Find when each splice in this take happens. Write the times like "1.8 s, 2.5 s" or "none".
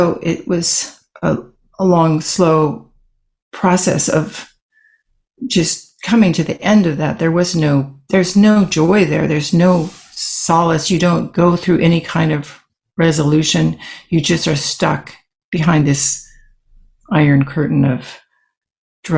none